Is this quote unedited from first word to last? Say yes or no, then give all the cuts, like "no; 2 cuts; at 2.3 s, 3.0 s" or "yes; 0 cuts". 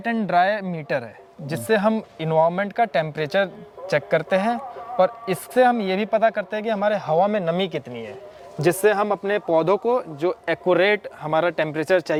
yes; 0 cuts